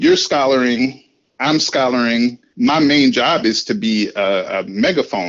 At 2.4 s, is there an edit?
yes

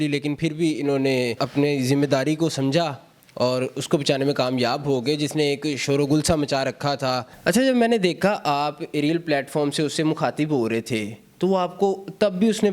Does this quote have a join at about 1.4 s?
yes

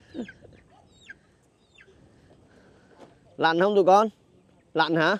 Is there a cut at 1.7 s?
no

